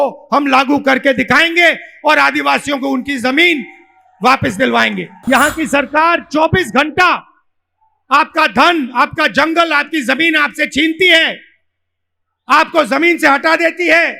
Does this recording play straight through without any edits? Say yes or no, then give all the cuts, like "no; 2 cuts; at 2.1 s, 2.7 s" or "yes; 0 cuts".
no; 1 cut; at 5.1 s